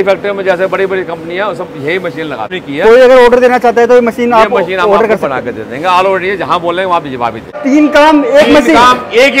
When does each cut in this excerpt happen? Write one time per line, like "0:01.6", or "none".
0:02.6
0:07.6